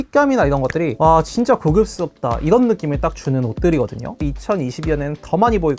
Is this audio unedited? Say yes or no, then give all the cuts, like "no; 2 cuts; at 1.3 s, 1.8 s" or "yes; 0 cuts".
no; 1 cut; at 4.1 s